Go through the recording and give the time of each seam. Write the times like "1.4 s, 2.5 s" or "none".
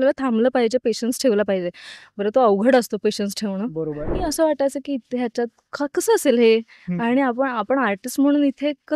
4.1 s

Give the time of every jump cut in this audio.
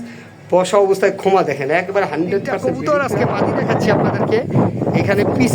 2.6 s

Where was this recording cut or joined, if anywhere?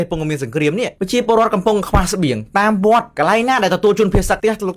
1.0 s

